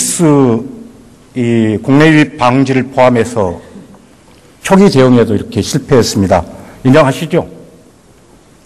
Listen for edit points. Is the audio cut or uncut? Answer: uncut